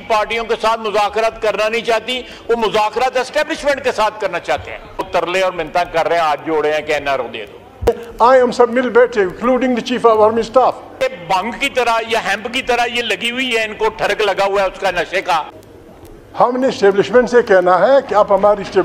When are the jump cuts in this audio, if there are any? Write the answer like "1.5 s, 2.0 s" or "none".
5.0 s, 7.9 s, 10.9 s, 15.6 s